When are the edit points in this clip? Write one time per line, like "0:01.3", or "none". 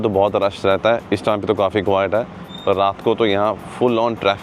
none